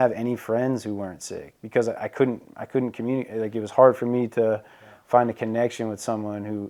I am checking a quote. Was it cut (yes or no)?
no